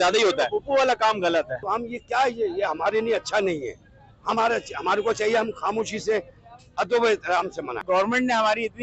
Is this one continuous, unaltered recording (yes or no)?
no